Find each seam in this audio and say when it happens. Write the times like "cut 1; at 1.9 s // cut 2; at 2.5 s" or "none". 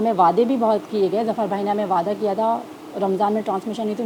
none